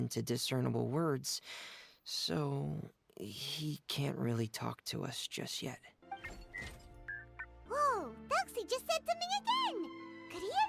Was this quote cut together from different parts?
yes; 2 cuts; at 5.9 s, 7.6 s

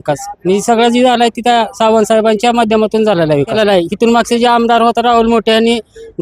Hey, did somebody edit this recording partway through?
yes; 1 cut; at 3.5 s

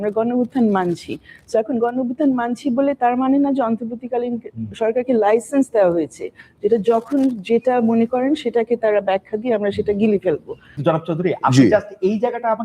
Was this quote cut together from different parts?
yes; 1 cut; at 10.7 s

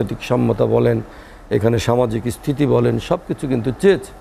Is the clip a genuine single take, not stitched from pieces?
yes; 0 cuts

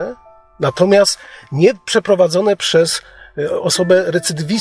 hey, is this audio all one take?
yes; 0 cuts

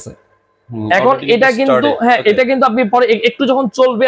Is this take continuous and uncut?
yes; 0 cuts

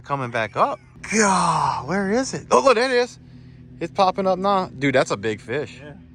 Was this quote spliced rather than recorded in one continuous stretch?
yes; 1 cut; at 0.9 s

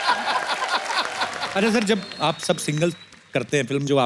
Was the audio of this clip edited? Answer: yes; 1 cut; at 1.4 s

